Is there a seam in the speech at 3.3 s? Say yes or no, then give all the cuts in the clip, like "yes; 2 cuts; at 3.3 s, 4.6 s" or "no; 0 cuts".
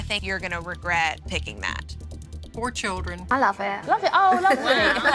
yes; 1 cut; at 3.3 s